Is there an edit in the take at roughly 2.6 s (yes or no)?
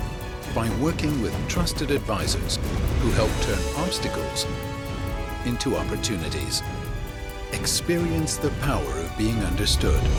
no